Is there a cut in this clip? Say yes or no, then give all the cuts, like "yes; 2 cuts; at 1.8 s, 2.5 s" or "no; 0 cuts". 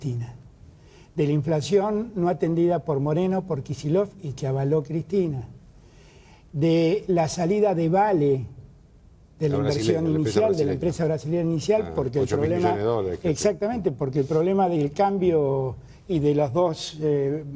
no; 0 cuts